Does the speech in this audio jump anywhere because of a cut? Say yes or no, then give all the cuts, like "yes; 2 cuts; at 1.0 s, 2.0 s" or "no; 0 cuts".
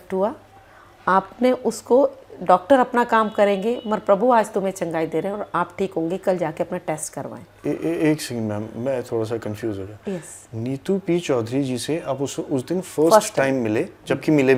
no; 0 cuts